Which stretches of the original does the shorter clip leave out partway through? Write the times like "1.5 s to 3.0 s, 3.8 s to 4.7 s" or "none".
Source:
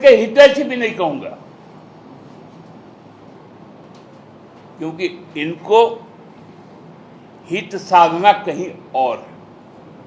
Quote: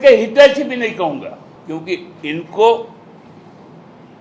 1.5 s to 4.6 s

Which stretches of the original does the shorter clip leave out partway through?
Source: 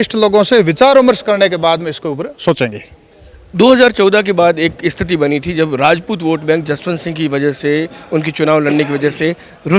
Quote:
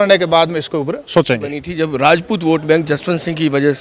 3.0 s to 5.4 s

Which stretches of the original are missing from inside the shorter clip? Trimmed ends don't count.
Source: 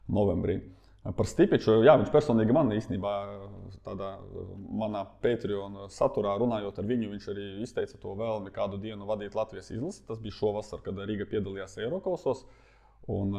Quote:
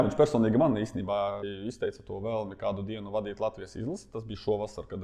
3.4 s to 7.4 s

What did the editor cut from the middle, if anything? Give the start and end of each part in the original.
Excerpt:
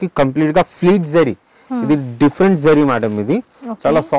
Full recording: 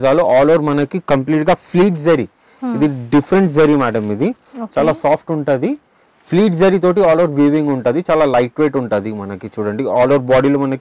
none

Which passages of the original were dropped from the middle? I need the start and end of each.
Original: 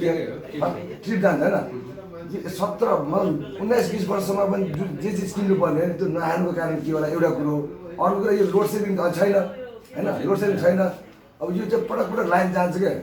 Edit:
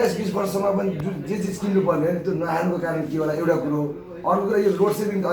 none

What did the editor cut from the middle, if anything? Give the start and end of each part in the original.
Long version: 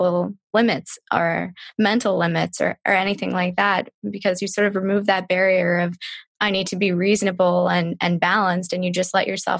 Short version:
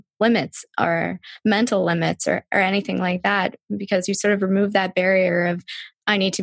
none

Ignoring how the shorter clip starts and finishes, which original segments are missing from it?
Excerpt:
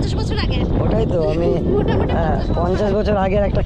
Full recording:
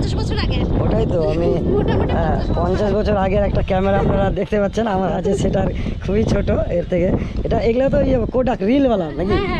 none

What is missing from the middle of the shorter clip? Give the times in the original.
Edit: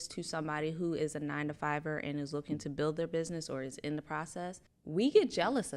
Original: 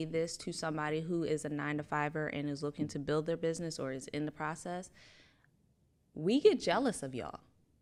5.0 s to 6.0 s

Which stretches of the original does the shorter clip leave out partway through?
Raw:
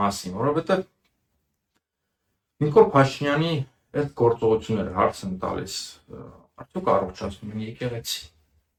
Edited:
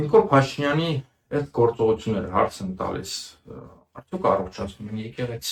none

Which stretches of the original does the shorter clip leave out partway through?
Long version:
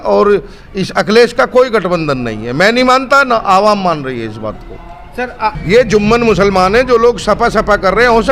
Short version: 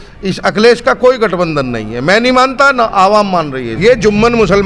4.2 s to 5.6 s

